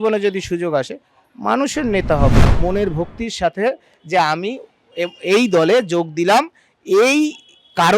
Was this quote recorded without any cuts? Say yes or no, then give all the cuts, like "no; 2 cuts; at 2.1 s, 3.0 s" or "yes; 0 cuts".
no; 1 cut; at 2.5 s